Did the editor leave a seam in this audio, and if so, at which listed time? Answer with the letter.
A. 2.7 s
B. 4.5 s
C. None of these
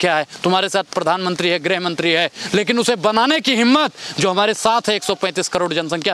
C